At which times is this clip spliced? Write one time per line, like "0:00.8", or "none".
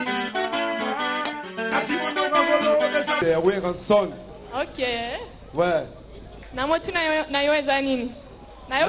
0:03.2